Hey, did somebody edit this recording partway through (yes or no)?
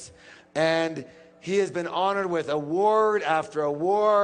no